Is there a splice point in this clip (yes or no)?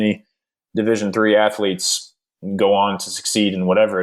no